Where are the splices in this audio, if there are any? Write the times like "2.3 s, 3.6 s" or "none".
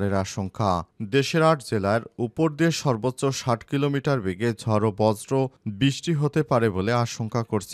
none